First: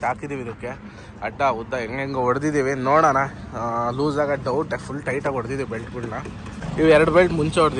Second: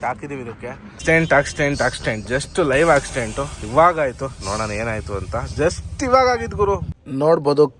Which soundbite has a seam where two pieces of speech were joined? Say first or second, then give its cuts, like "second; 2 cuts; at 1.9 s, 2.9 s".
second; 2 cuts; at 1.0 s, 6.9 s